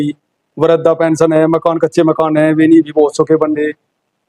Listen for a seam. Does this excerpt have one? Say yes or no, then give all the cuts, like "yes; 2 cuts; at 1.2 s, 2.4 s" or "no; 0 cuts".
no; 0 cuts